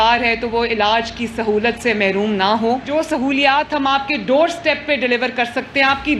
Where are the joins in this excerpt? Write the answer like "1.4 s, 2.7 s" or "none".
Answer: 2.9 s